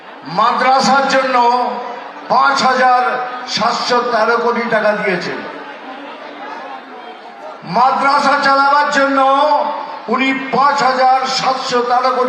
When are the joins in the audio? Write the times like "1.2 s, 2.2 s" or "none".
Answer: none